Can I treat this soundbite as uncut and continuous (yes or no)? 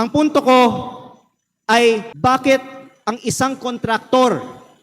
no